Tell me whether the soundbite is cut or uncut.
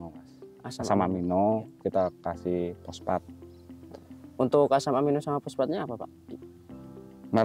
uncut